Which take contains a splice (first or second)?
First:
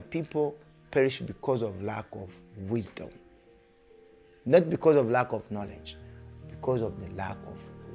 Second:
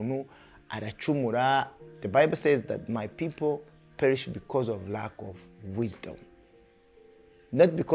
second